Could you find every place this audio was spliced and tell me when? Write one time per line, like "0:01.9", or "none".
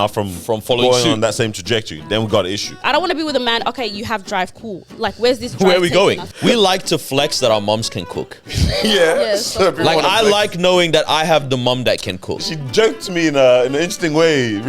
0:02.8
0:06.3
0:12.4

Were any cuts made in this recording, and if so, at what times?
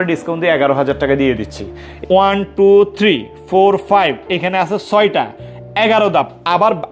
0:01.8

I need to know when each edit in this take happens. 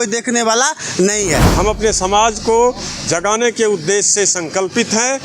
0:01.5

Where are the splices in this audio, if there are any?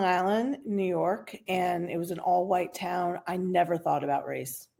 none

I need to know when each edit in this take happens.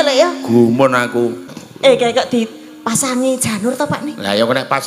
0:01.5

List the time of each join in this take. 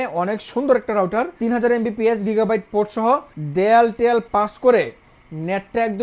0:01.3
0:03.4

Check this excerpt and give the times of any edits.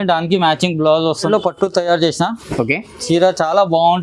0:01.3

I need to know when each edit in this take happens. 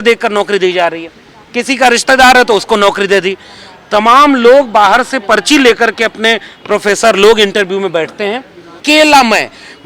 0:08.8

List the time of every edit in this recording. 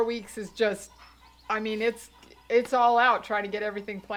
none

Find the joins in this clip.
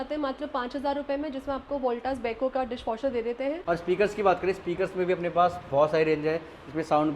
0:03.6

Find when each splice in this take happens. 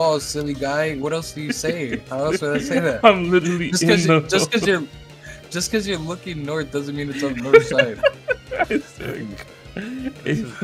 none

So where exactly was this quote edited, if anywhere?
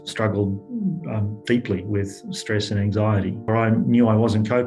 0:03.5

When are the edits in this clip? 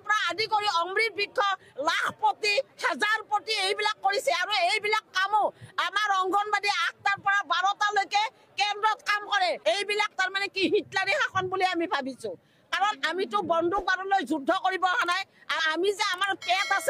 0:09.6
0:15.6

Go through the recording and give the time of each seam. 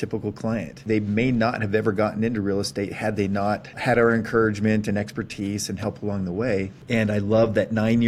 0:00.8
0:03.7
0:06.8

